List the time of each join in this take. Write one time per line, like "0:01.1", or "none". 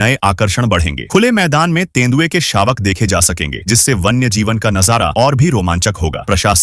none